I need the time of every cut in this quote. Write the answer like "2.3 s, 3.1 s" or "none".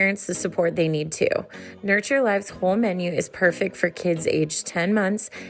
none